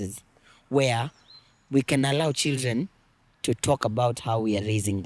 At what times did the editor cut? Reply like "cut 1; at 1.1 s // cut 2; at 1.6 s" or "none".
none